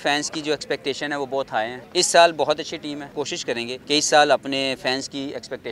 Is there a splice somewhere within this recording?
yes; 2 cuts; at 1.8 s, 3.3 s

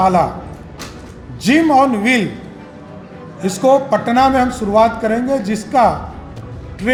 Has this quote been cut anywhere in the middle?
no; 0 cuts

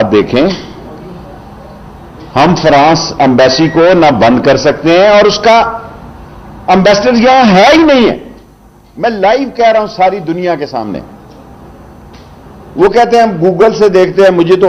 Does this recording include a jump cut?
no; 0 cuts

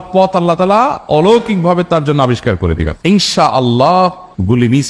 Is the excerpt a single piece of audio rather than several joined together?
no; 1 cut; at 2.9 s

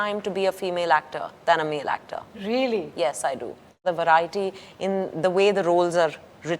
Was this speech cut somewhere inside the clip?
yes; 1 cut; at 3.8 s

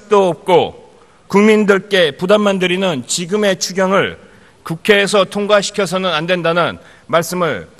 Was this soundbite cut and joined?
yes; 1 cut; at 5.1 s

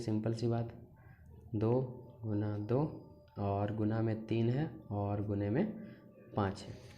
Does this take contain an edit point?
no; 0 cuts

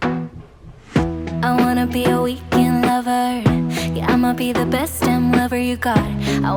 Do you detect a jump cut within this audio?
no; 0 cuts

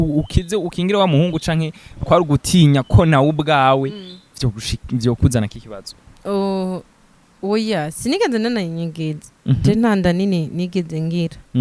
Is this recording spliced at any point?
no; 0 cuts

